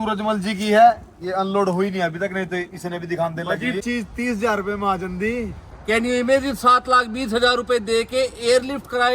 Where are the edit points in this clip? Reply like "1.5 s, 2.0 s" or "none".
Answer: 3.8 s, 5.7 s

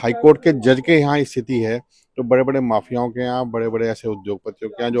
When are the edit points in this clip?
none

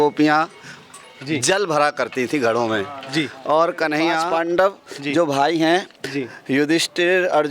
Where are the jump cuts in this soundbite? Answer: 4.2 s

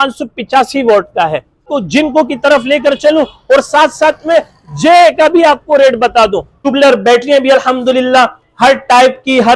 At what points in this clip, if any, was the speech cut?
1.7 s, 6.6 s

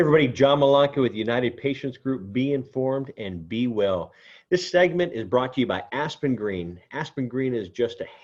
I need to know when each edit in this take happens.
none

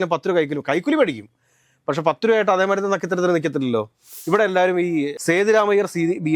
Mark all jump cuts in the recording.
4.1 s

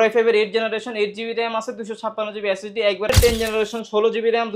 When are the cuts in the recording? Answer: 3.1 s

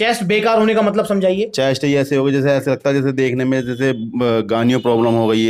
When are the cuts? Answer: none

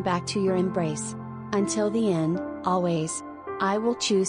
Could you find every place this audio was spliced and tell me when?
1.0 s

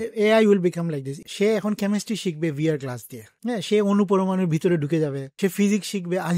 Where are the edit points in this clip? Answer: 1.2 s, 5.3 s

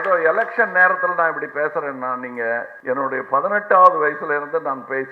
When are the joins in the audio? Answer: 2.7 s

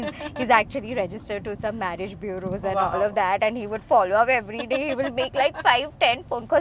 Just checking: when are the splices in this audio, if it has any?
none

